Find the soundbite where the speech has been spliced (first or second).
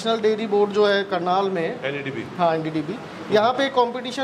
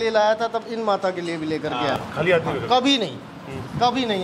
second